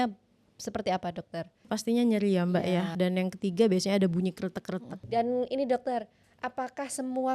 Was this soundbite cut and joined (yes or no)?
yes